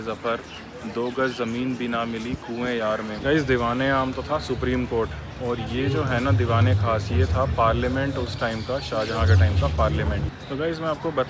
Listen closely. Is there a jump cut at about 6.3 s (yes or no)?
no